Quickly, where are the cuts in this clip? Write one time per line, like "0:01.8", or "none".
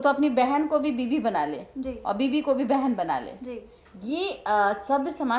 none